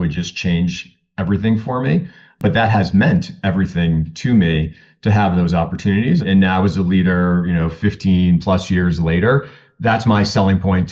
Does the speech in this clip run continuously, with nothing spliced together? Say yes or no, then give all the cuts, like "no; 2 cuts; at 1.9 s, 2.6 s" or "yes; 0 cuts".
no; 2 cuts; at 2.4 s, 6.2 s